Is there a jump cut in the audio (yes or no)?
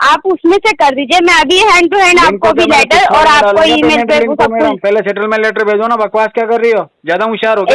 no